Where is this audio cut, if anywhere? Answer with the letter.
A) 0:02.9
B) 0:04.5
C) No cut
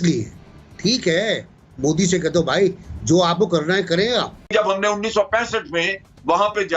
B